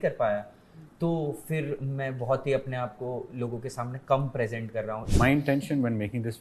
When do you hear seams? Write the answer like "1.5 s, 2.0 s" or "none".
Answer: 5.0 s